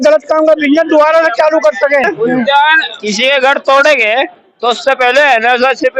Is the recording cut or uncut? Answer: cut